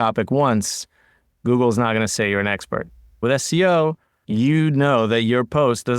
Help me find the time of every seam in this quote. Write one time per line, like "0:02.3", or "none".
0:03.1
0:04.1